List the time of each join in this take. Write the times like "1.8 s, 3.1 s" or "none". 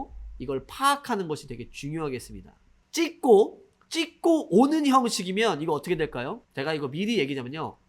2.8 s

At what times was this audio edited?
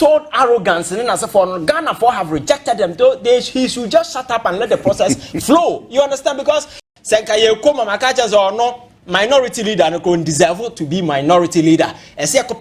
6.9 s

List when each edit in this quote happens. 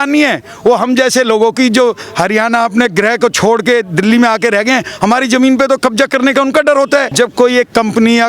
7.1 s

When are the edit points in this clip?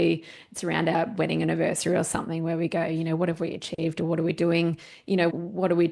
none

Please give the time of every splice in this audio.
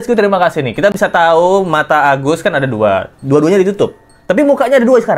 none

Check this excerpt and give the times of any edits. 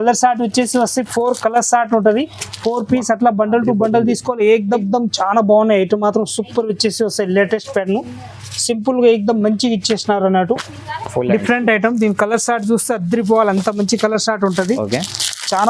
4.8 s

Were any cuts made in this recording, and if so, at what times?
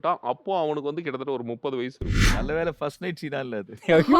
2.3 s

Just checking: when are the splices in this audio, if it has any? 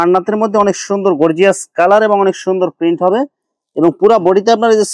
none

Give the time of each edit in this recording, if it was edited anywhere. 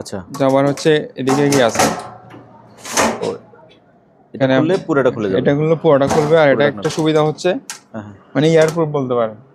none

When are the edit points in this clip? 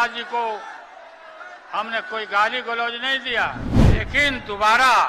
3.7 s

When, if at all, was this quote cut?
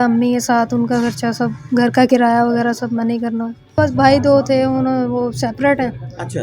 3.8 s

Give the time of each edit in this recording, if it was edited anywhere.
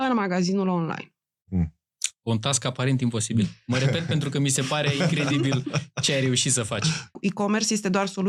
7.1 s

